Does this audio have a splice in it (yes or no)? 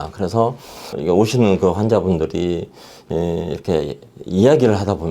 yes